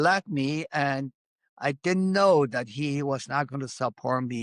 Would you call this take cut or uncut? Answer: uncut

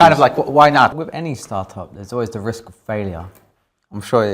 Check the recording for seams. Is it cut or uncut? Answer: cut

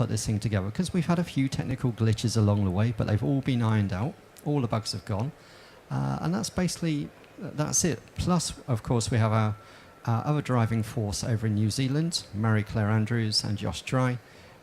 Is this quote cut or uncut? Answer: cut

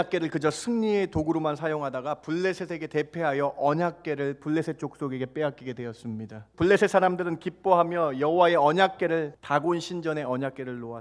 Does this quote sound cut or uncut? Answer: cut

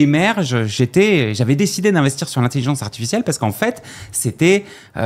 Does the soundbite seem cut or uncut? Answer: uncut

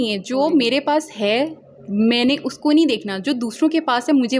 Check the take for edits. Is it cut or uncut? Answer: uncut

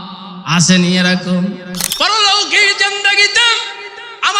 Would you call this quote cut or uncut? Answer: cut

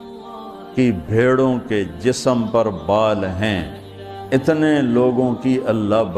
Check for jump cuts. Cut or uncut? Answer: uncut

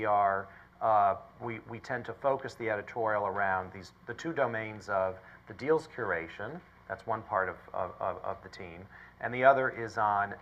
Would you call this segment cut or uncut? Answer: uncut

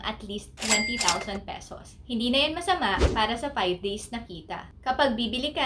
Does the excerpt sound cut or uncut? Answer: cut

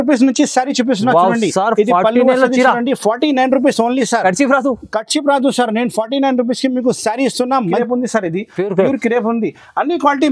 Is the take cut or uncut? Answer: cut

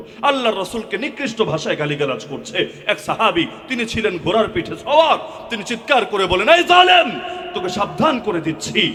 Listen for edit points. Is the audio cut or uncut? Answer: uncut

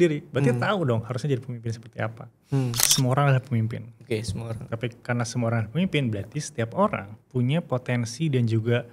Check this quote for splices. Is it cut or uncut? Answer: cut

